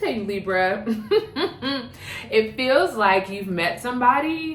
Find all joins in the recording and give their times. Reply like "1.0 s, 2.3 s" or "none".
none